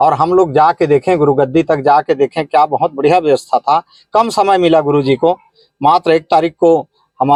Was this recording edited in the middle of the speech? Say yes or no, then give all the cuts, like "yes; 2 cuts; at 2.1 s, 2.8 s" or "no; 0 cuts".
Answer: no; 0 cuts